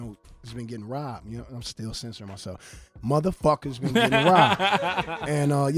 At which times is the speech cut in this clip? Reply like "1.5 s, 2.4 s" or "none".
1.0 s